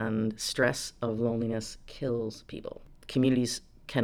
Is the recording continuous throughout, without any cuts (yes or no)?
no